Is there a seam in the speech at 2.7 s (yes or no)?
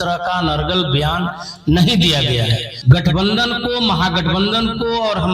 yes